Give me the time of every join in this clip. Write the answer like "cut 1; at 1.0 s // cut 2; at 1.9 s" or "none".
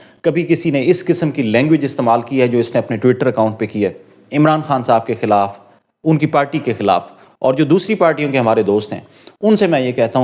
none